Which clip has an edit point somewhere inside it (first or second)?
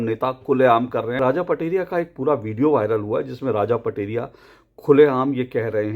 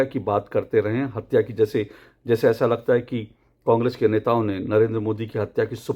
first